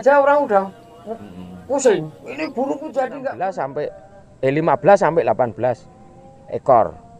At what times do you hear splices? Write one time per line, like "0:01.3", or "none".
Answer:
0:03.3